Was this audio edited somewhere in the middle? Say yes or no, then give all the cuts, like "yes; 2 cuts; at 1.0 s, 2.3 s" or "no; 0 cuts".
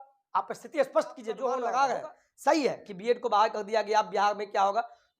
yes; 1 cut; at 1.5 s